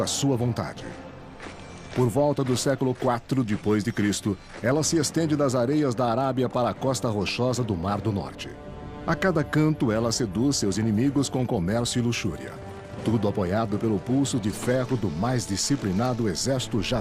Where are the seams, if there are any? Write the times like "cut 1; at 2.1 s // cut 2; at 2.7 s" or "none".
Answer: cut 1; at 13.3 s